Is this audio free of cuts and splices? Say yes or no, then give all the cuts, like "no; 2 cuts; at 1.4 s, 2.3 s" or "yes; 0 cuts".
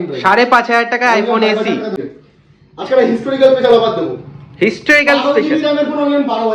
no; 1 cut; at 2.1 s